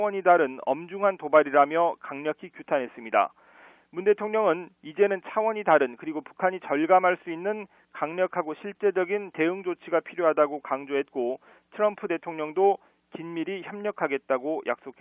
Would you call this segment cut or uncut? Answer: cut